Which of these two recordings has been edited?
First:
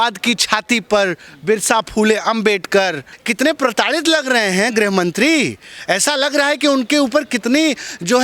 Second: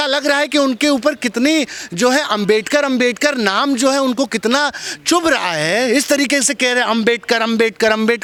first; 1 cut; at 3.1 s

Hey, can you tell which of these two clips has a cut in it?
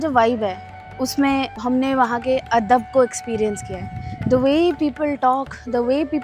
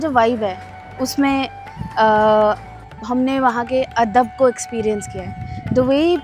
first; 1 cut; at 1.5 s

